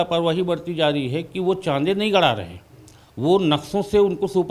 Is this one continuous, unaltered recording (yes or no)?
yes